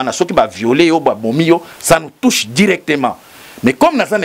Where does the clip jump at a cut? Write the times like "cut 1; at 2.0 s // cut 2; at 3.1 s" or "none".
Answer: none